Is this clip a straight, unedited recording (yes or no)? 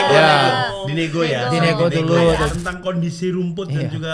no